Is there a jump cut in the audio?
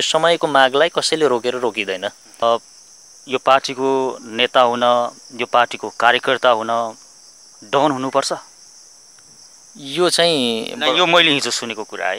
yes; 1 cut; at 2.4 s

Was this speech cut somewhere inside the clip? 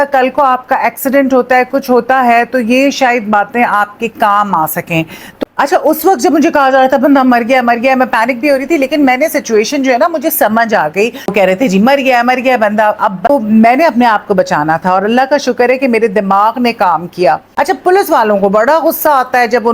yes; 4 cuts; at 5.6 s, 11.3 s, 13.3 s, 17.5 s

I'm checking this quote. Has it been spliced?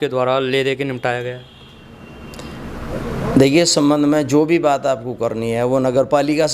no; 0 cuts

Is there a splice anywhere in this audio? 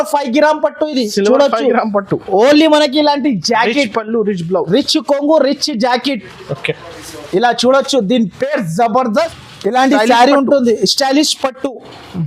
yes; 1 cut; at 9.4 s

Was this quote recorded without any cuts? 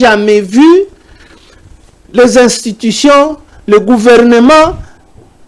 yes; 0 cuts

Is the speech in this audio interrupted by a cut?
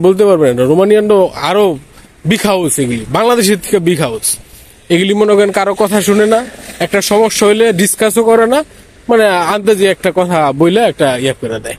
no; 0 cuts

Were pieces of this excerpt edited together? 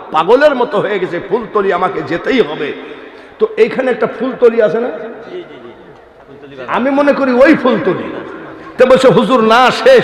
no; 0 cuts

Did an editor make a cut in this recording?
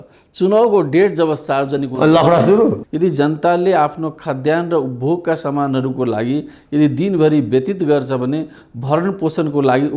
yes; 1 cut; at 2.8 s

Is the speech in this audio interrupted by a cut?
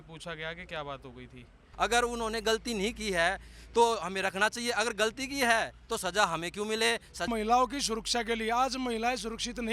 yes; 2 cuts; at 1.6 s, 7.3 s

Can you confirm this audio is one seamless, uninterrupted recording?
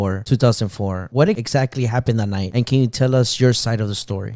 yes; 0 cuts

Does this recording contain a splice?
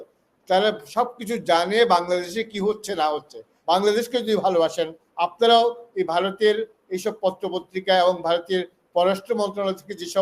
yes; 1 cut; at 3.5 s

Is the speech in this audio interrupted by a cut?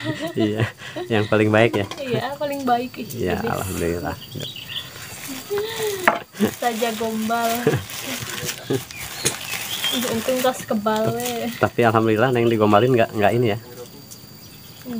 yes; 1 cut; at 5.1 s

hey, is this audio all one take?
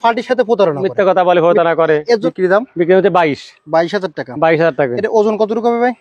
no; 1 cut; at 2.2 s

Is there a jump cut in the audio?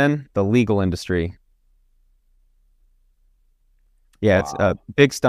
no; 0 cuts

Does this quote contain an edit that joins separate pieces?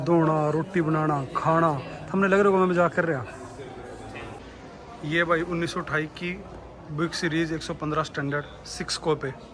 yes; 1 cut; at 4.4 s

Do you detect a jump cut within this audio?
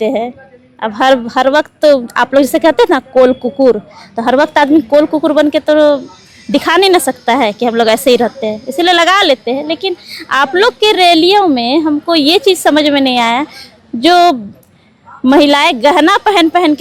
no; 0 cuts

